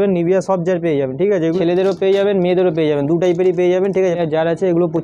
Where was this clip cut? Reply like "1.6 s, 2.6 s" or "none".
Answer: 1.6 s, 4.2 s